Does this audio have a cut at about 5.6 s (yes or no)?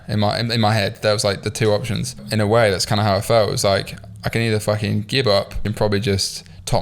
yes